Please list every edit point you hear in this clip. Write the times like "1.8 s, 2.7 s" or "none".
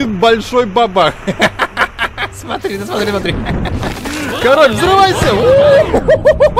none

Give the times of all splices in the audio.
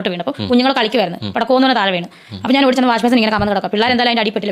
none

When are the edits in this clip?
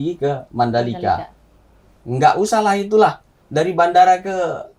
none

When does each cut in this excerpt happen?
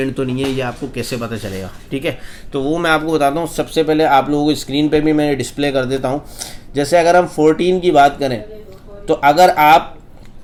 none

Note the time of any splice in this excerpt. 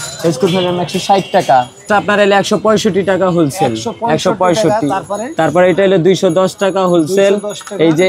1.8 s

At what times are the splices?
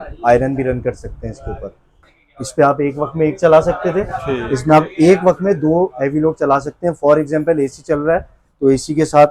2.0 s

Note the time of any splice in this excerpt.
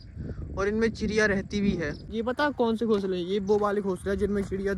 2.1 s

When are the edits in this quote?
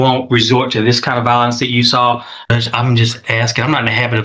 2.3 s

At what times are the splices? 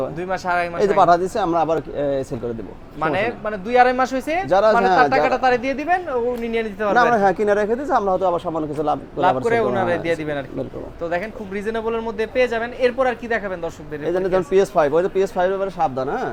none

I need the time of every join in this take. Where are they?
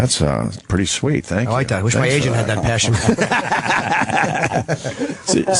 none

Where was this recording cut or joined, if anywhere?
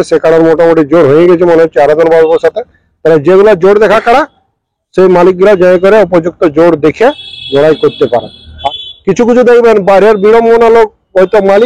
8.5 s

